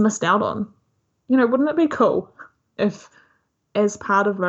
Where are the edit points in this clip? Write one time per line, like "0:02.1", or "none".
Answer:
none